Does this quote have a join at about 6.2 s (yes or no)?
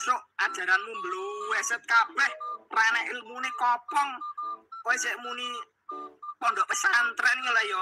no